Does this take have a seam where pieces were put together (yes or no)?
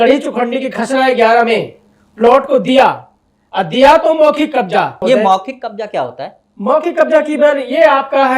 yes